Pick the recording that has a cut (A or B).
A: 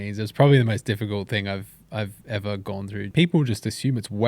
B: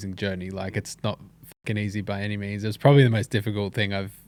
A